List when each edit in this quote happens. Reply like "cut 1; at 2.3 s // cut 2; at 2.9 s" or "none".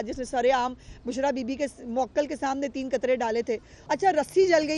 cut 1; at 3.7 s